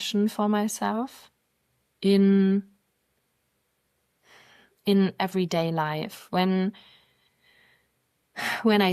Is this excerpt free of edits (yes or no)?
yes